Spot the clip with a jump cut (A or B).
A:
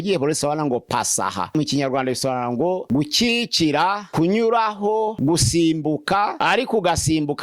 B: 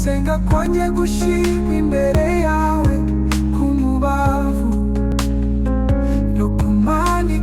A